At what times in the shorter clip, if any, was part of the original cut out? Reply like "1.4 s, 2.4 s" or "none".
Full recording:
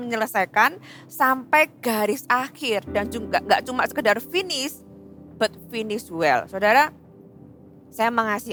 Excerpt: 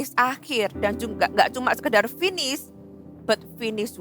none